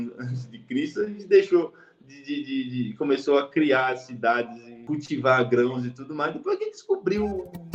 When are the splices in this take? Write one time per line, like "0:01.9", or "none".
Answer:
0:04.8

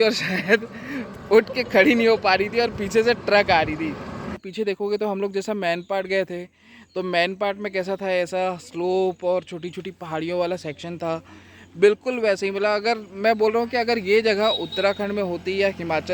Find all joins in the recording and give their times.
0:04.4

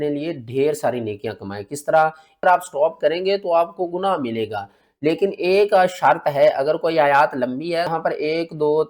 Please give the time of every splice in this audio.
0:02.4
0:07.9

